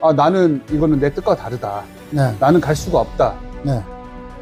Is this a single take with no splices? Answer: yes; 0 cuts

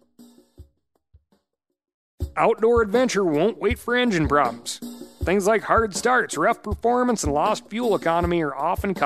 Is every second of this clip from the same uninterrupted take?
no; 1 cut; at 2.3 s

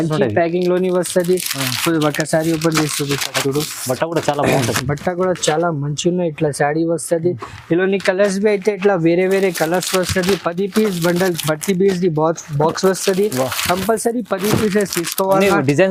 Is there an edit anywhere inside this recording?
no; 0 cuts

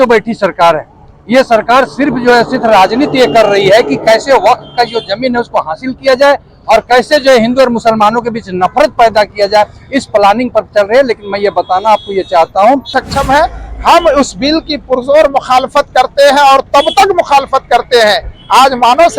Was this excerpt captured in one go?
no; 1 cut; at 13.0 s

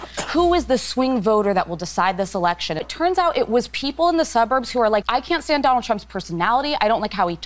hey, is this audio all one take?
no; 2 cuts; at 2.9 s, 5.1 s

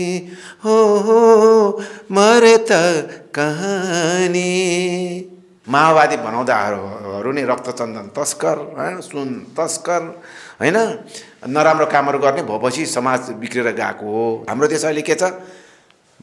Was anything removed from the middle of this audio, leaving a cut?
yes; 2 cuts; at 5.5 s, 14.4 s

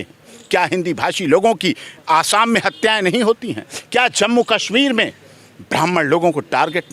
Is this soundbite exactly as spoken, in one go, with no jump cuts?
yes; 0 cuts

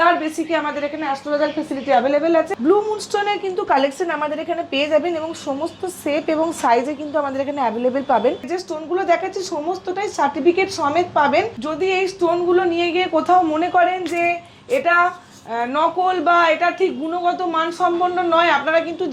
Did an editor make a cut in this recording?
yes; 3 cuts; at 2.5 s, 8.5 s, 11.6 s

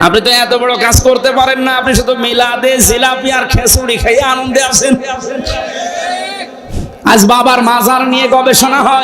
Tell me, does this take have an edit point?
yes; 1 cut; at 6.7 s

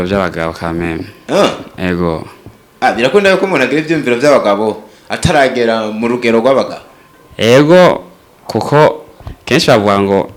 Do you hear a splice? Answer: no; 0 cuts

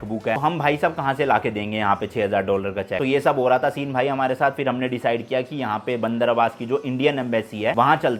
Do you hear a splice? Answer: no; 0 cuts

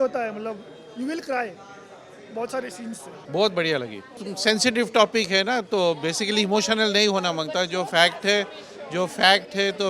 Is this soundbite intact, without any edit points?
yes; 0 cuts

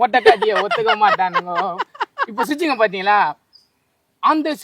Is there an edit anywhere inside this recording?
no; 0 cuts

